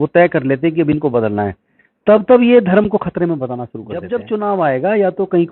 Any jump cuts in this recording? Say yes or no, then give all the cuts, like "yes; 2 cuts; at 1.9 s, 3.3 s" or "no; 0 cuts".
yes; 1 cut; at 4.0 s